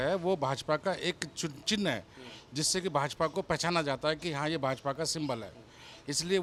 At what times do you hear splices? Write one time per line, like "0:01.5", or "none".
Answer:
none